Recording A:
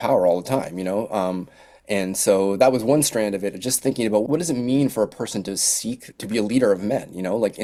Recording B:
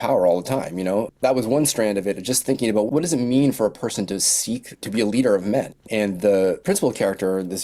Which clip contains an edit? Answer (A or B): B